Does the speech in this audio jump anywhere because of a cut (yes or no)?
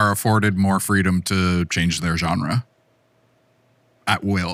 no